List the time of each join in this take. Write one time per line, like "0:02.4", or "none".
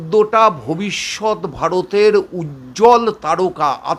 none